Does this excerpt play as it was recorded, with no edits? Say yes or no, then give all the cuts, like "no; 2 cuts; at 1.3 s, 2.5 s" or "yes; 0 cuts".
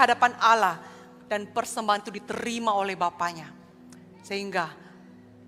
yes; 0 cuts